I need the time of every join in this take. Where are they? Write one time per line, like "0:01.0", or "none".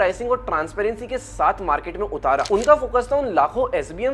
0:02.5